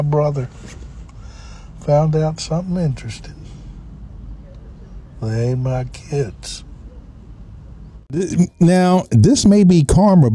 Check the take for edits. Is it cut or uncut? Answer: cut